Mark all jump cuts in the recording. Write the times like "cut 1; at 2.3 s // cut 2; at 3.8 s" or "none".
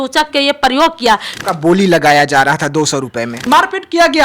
cut 1; at 1.3 s // cut 2; at 3.3 s